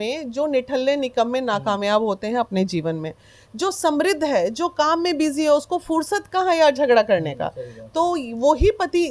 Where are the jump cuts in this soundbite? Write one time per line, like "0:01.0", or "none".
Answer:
none